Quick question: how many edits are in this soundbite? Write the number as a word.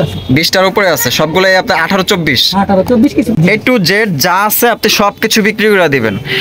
one